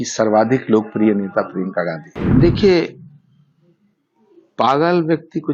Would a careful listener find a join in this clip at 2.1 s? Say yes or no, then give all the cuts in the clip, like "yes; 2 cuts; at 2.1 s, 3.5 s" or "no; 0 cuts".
yes; 1 cut; at 2.1 s